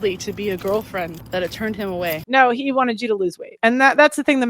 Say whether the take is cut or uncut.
cut